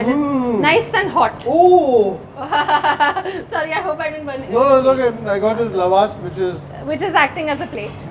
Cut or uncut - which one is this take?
uncut